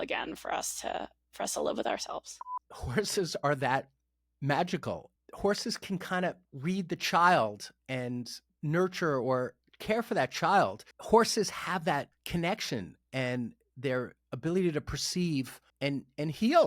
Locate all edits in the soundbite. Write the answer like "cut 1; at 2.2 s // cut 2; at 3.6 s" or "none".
cut 1; at 2.5 s // cut 2; at 5.1 s // cut 3; at 10.9 s